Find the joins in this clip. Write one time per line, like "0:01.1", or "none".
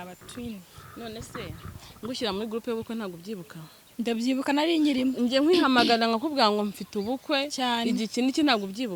none